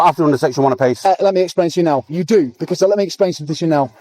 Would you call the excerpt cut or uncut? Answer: uncut